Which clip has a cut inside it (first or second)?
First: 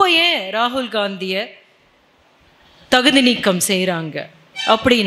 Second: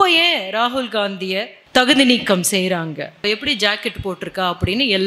second